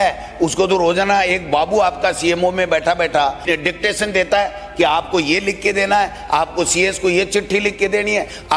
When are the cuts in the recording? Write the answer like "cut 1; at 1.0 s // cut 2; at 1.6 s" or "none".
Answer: cut 1; at 3.4 s

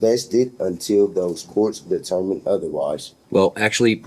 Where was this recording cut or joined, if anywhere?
cut 1; at 3.1 s

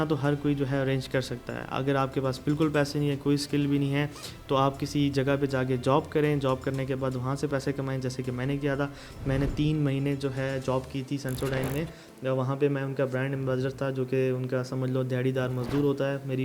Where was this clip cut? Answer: none

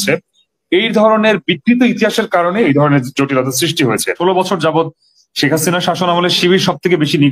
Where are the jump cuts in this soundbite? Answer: cut 1; at 4.2 s

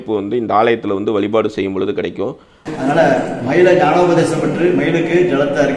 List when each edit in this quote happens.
cut 1; at 2.7 s

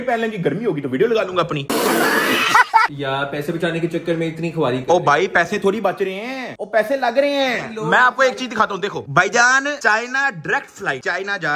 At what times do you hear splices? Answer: none

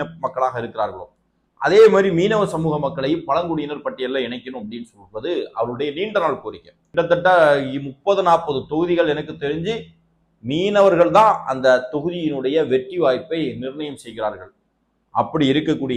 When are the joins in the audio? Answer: cut 1; at 6.9 s

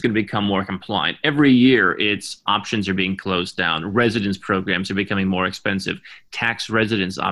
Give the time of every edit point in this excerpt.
none

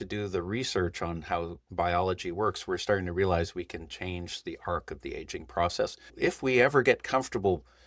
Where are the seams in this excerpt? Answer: cut 1; at 6.0 s

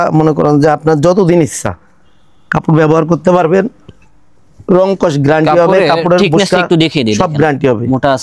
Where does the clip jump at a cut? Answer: none

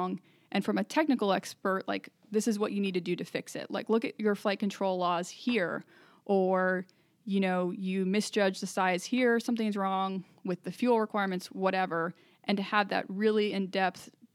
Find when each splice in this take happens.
none

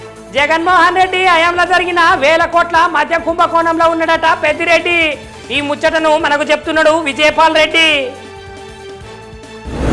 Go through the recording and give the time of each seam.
none

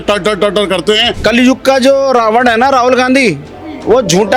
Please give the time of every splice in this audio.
cut 1; at 1.1 s

